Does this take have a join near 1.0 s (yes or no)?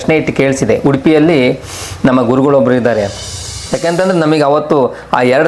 no